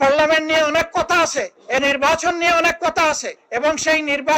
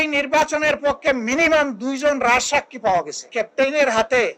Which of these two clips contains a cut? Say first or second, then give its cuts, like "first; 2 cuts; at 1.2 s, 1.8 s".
second; 1 cut; at 3.3 s